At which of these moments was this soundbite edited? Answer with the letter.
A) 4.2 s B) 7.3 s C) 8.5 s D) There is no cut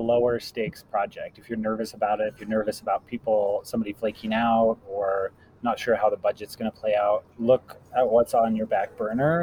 B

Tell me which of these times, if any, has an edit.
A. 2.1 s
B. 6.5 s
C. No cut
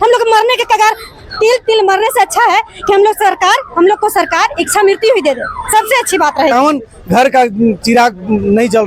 B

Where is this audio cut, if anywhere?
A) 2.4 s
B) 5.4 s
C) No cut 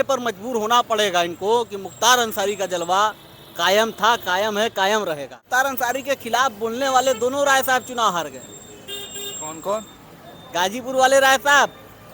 B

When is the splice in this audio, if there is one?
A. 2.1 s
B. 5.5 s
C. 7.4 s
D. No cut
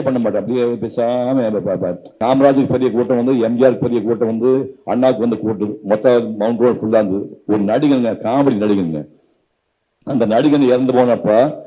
A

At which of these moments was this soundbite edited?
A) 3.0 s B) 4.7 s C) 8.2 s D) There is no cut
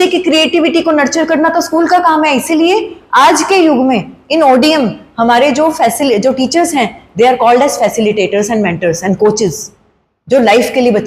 D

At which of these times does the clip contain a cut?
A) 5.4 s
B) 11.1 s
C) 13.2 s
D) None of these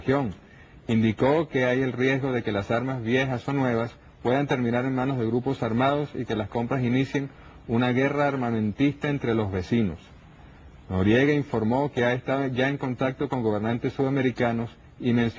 C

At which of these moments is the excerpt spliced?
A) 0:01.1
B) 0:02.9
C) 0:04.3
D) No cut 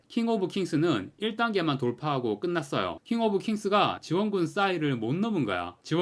B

